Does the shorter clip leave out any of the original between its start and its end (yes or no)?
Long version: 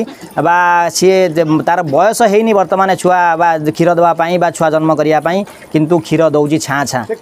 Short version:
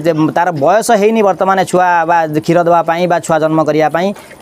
no